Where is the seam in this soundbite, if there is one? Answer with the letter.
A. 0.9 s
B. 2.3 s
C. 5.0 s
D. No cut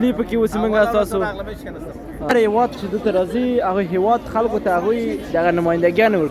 B